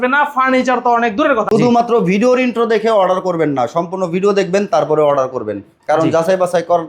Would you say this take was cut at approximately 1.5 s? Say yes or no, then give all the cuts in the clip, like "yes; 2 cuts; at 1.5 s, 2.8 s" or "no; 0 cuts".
yes; 1 cut; at 1.5 s